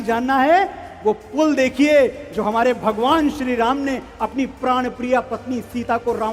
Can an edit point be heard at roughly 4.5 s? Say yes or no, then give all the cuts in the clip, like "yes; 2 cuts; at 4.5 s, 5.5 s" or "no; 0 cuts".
no; 0 cuts